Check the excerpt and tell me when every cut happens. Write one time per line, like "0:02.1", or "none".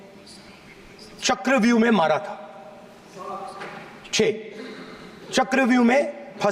none